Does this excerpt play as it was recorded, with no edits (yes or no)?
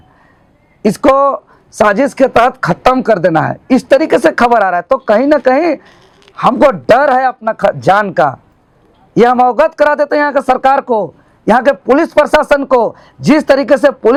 yes